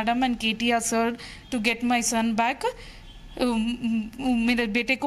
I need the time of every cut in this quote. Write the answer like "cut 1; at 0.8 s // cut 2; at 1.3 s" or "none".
none